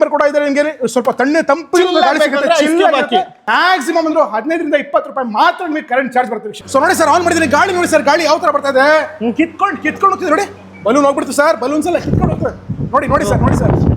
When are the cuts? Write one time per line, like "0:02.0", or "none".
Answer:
0:03.4
0:06.4